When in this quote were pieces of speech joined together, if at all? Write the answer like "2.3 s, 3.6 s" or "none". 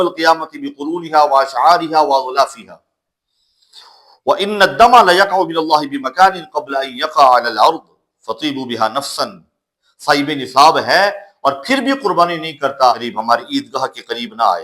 9.8 s, 13.1 s